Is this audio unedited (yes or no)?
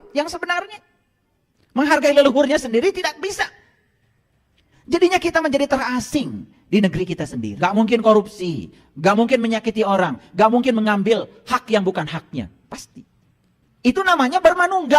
no